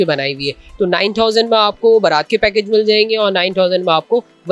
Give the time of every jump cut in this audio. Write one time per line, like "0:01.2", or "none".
none